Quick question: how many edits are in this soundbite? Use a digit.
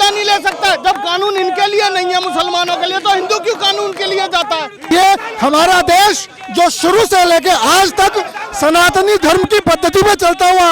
1